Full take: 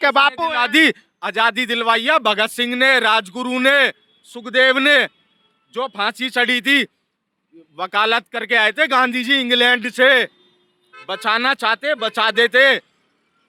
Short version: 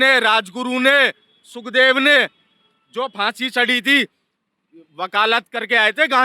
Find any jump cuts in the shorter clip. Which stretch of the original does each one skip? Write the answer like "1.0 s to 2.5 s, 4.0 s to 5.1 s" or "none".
none